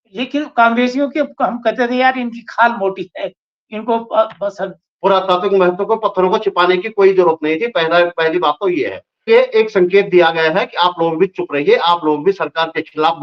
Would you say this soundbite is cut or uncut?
cut